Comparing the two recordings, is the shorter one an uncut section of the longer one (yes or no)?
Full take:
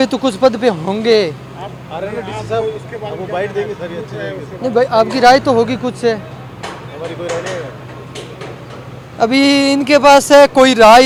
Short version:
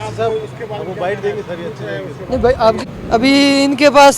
no